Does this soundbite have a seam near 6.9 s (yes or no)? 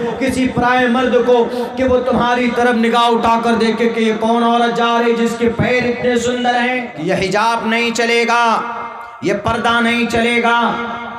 yes